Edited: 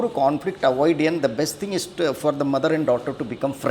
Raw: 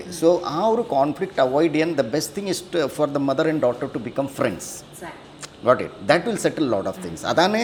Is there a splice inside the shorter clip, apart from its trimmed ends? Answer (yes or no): no